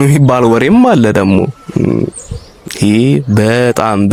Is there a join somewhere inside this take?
no; 0 cuts

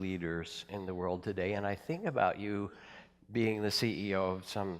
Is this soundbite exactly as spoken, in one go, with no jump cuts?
no; 1 cut; at 1.3 s

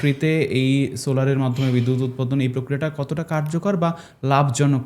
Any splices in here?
no; 0 cuts

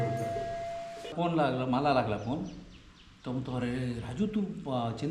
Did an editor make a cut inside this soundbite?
yes; 1 cut; at 1.1 s

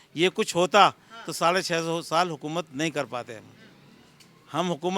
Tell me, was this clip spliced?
no; 0 cuts

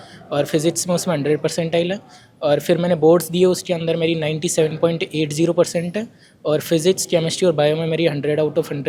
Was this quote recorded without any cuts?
yes; 0 cuts

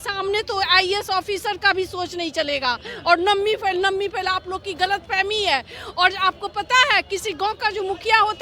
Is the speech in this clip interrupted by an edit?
no; 0 cuts

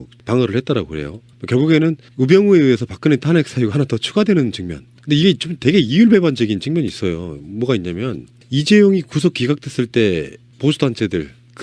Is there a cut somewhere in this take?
yes; 1 cut; at 10.4 s

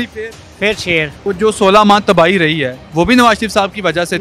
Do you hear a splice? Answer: yes; 1 cut; at 1.2 s

